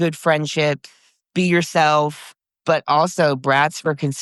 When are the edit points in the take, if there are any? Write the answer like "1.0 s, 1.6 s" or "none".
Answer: 1.1 s, 2.3 s